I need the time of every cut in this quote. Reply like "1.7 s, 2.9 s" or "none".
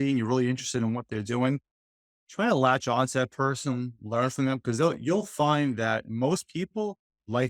none